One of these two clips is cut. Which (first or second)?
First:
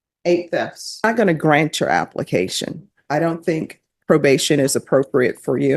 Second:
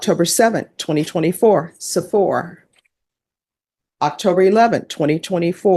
first